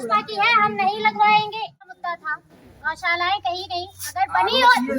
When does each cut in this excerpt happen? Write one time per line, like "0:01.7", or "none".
0:01.9